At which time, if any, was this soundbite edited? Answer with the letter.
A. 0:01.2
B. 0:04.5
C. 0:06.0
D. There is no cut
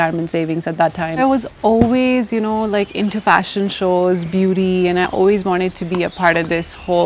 A